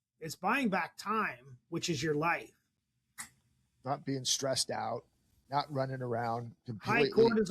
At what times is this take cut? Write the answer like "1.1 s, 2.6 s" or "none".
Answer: none

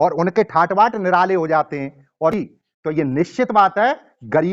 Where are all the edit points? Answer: 2.3 s

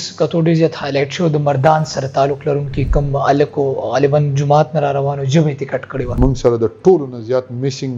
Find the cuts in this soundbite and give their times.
6.1 s

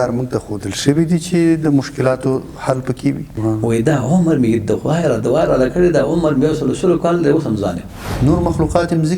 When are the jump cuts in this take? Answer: 3.3 s, 8.0 s

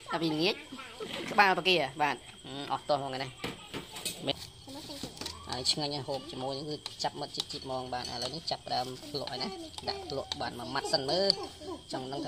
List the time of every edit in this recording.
4.3 s

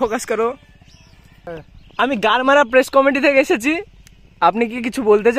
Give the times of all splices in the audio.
1.5 s

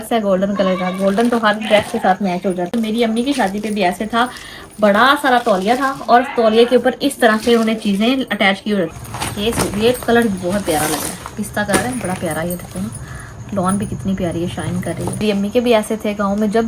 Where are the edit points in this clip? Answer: 2.7 s, 9.0 s, 15.1 s

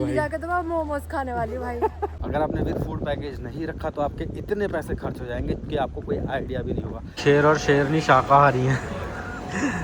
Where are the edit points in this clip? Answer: 2.2 s, 7.2 s

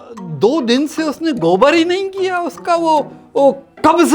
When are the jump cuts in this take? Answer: none

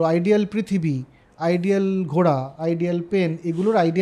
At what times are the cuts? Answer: none

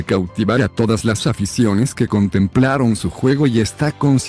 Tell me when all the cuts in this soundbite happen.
none

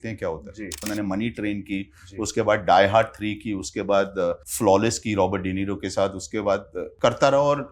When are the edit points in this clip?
0.9 s, 4.5 s, 6.8 s

